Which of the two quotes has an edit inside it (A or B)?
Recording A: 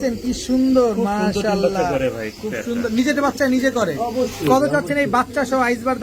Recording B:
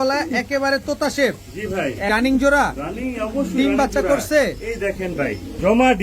B